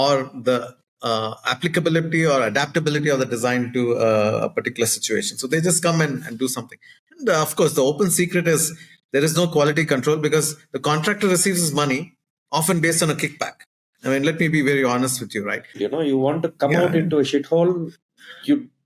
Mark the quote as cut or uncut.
cut